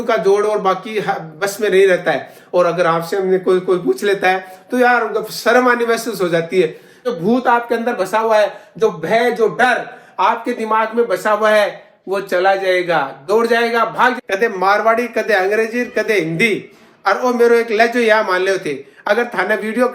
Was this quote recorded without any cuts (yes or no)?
no